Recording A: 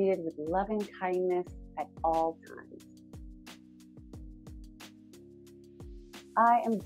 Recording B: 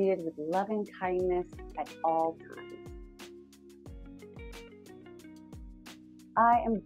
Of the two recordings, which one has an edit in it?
B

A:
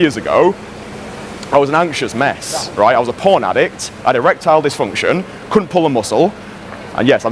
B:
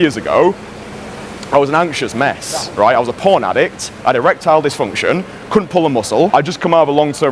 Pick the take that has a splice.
B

